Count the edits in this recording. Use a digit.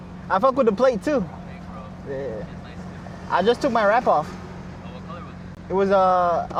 0